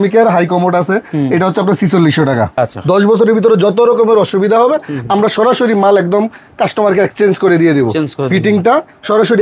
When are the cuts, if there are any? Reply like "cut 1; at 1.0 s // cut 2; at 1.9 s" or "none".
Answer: cut 1; at 2.5 s